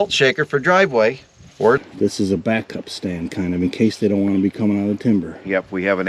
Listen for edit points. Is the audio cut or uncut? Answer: cut